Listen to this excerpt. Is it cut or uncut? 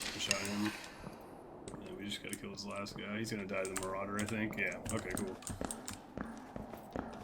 cut